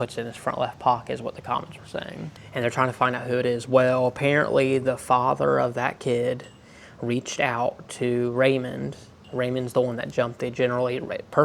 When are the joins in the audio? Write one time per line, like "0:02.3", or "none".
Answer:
0:02.4